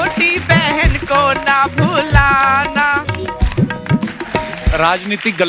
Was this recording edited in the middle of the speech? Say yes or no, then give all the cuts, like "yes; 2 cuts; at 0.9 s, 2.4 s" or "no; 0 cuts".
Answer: yes; 1 cut; at 4.6 s